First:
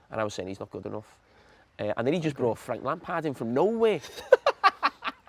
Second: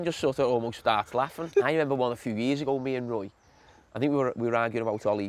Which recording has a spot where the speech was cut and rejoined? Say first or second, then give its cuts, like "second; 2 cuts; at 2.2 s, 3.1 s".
second; 1 cut; at 1.4 s